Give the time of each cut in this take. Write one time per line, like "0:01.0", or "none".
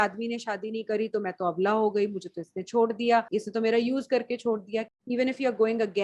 0:03.3
0:04.9